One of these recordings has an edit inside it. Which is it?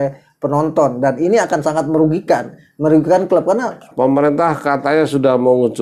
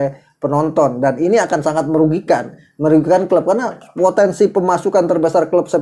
first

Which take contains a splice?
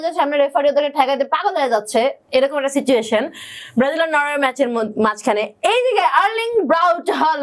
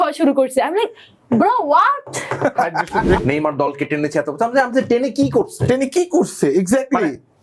second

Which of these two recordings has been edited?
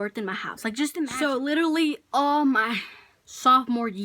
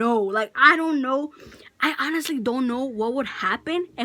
first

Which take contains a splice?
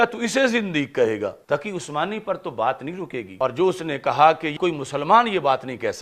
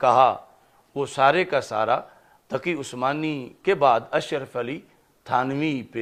first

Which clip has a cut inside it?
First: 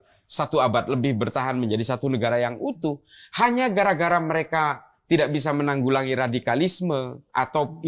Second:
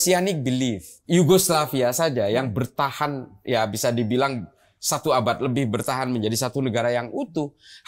second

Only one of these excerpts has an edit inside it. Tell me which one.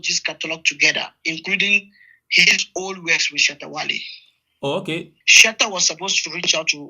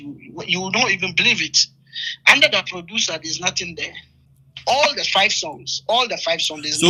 first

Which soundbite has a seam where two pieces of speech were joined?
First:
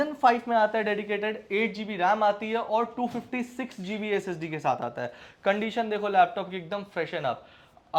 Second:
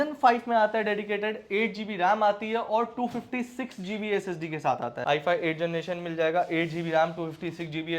second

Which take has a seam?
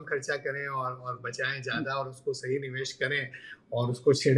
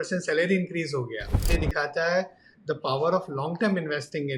second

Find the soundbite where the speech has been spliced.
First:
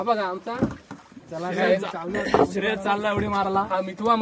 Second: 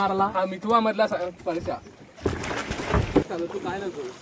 second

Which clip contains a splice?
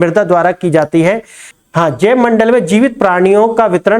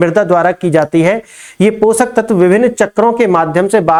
first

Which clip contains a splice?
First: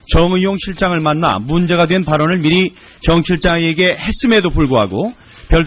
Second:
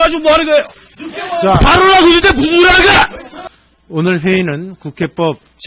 second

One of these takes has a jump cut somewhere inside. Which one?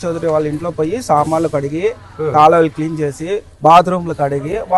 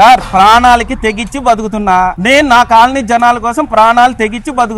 second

